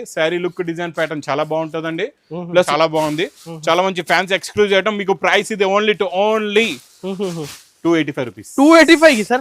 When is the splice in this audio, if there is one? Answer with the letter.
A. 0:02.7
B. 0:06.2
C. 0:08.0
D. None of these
A